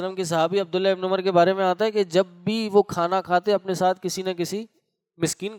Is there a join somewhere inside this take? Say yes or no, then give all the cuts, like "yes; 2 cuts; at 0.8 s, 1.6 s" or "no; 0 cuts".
no; 0 cuts